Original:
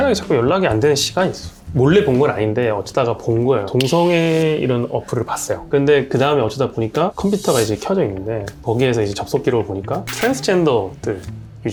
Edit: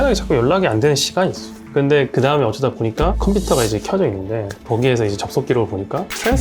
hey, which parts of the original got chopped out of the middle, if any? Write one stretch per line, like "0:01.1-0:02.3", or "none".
0:01.5-0:05.5